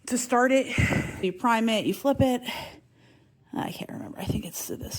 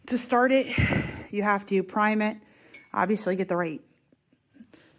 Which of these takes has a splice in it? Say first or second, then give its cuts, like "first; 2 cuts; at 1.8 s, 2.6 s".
first; 1 cut; at 1.1 s